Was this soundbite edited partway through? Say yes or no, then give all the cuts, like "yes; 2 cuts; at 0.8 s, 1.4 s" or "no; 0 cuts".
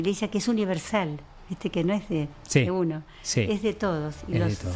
no; 0 cuts